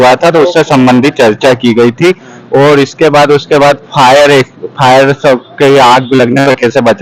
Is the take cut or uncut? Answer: uncut